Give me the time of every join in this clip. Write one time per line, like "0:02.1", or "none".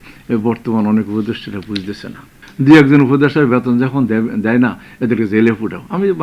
0:02.4